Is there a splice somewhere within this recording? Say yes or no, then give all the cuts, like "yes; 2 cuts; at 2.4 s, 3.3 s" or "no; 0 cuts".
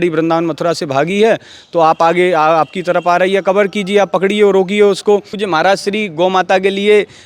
yes; 1 cut; at 5.4 s